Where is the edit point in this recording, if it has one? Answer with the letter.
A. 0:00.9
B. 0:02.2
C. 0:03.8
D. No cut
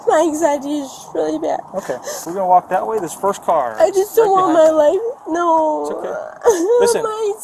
B